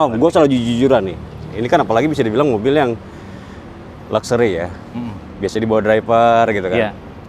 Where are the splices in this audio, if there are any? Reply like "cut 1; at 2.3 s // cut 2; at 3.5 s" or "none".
none